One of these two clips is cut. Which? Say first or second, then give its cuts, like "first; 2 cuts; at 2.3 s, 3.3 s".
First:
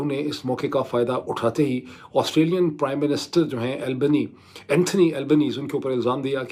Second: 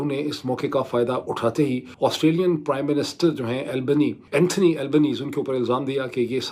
second; 2 cuts; at 1.9 s, 4.2 s